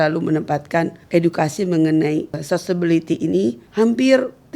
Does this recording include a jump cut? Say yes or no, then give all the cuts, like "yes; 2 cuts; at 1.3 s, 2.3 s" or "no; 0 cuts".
yes; 3 cuts; at 1.0 s, 2.4 s, 3.6 s